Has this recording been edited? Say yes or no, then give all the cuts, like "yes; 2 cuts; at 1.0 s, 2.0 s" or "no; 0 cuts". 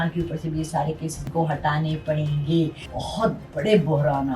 yes; 2 cuts; at 1.2 s, 2.9 s